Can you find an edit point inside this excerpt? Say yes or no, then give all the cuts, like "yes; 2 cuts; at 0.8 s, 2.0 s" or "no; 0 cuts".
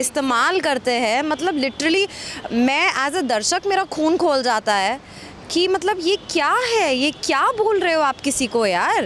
no; 0 cuts